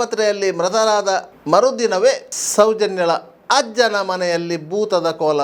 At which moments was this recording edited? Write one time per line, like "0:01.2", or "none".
0:01.3
0:02.4